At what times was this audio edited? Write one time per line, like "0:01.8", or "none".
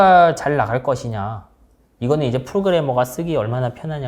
none